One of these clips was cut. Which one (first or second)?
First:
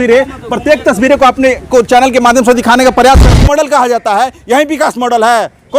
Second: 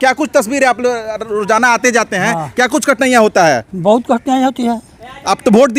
first